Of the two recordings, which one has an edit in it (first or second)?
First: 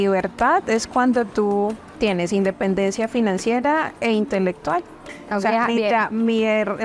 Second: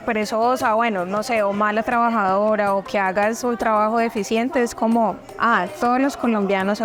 first